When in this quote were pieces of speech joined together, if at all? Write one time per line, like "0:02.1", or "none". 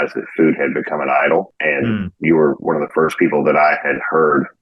none